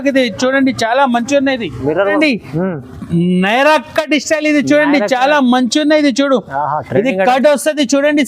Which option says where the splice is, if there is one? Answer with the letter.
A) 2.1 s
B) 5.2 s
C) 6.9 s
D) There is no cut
A